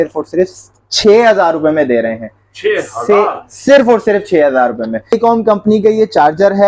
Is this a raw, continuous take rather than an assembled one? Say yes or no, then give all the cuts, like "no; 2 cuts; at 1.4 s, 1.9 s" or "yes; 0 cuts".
no; 1 cut; at 5.1 s